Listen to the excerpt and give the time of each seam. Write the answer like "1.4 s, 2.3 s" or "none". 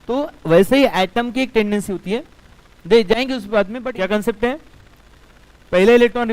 3.8 s